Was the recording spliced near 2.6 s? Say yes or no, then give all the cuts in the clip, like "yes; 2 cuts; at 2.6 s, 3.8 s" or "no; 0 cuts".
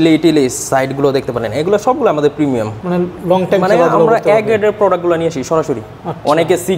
no; 0 cuts